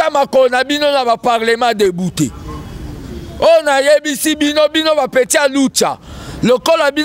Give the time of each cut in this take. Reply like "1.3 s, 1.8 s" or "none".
none